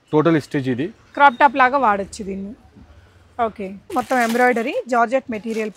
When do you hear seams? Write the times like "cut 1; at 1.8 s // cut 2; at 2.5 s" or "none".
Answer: cut 1; at 3.9 s